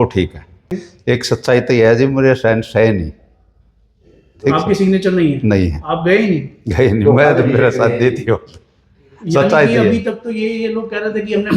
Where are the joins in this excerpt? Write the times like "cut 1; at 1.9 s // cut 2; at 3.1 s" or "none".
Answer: cut 1; at 0.9 s

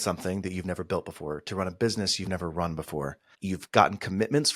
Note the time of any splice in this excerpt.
cut 1; at 3.2 s

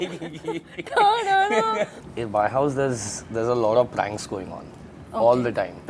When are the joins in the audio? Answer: cut 1; at 2.0 s

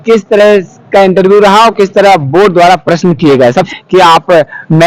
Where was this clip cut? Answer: cut 1; at 3.7 s

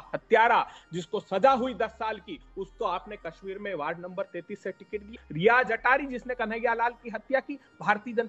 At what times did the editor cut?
cut 1; at 2.4 s // cut 2; at 5.2 s

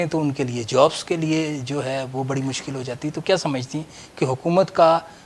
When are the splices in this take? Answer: none

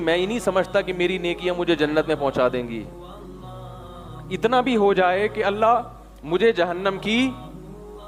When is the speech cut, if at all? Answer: none

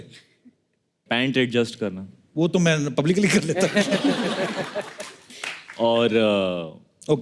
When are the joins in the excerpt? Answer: none

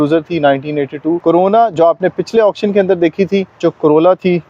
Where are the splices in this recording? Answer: cut 1; at 1.2 s // cut 2; at 3.6 s

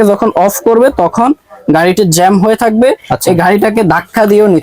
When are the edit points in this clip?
none

